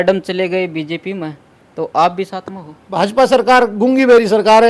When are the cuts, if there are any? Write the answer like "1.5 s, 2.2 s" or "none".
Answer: 2.9 s